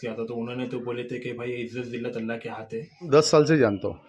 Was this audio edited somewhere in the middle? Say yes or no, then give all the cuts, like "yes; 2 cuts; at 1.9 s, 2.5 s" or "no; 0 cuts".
yes; 1 cut; at 3.1 s